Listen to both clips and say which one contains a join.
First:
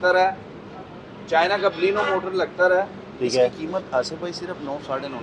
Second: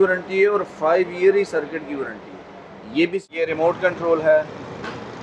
second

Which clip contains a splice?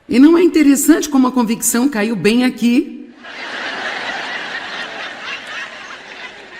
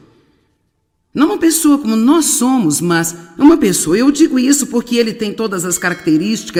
first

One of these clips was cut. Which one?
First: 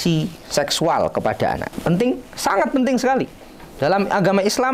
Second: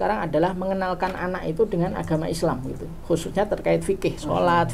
first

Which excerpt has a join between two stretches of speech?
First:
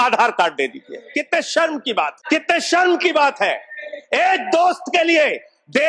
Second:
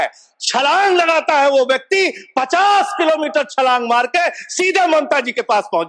first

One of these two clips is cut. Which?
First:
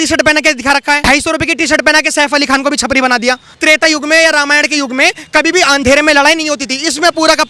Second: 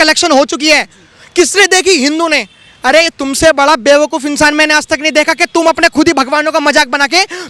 first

